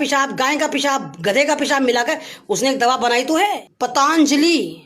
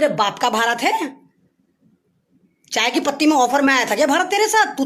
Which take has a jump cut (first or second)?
first